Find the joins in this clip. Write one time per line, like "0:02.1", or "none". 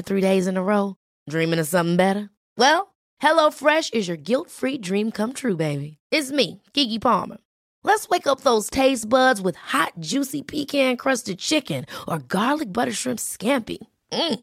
none